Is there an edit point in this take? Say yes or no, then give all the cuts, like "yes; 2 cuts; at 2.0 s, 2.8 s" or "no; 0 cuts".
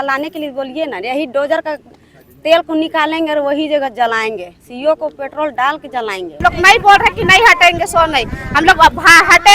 yes; 1 cut; at 6.4 s